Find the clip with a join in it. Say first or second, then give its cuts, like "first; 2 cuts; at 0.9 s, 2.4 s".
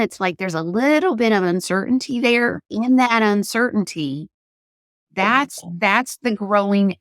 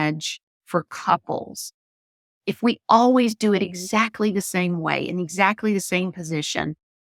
first; 1 cut; at 2.7 s